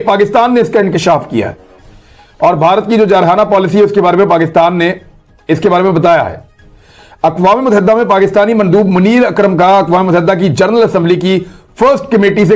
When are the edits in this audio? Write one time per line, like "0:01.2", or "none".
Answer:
none